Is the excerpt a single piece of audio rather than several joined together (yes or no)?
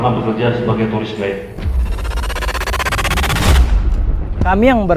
no